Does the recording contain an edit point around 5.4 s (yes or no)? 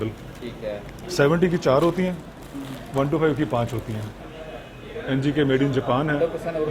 no